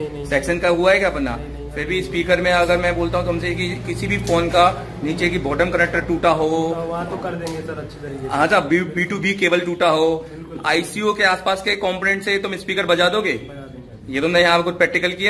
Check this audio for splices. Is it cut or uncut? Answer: uncut